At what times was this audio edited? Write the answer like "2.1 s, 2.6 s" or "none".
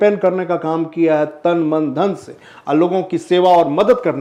none